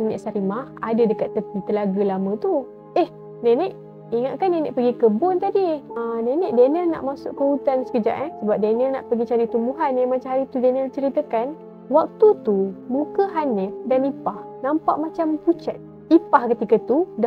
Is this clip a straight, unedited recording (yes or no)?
yes